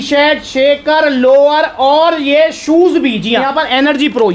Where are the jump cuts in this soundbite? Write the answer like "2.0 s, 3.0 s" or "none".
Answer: 3.4 s